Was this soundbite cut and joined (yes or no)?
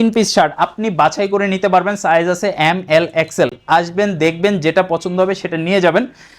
no